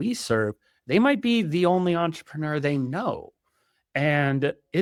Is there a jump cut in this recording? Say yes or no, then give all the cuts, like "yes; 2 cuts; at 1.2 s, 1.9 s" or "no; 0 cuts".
no; 0 cuts